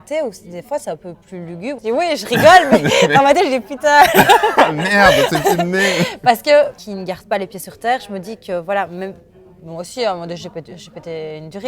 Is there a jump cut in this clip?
yes; 2 cuts; at 1.8 s, 6.8 s

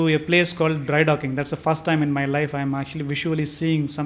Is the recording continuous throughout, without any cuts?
yes; 0 cuts

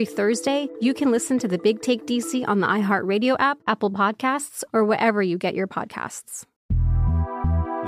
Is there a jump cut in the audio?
yes; 1 cut; at 6.5 s

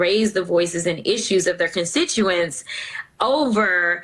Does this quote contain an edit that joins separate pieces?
no; 0 cuts

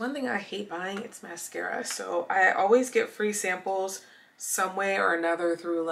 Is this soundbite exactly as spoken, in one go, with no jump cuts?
yes; 0 cuts

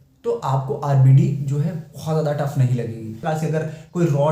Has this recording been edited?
yes; 1 cut; at 3.2 s

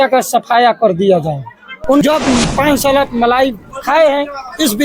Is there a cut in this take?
yes; 1 cut; at 2.0 s

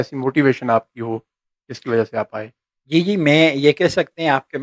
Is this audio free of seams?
yes; 0 cuts

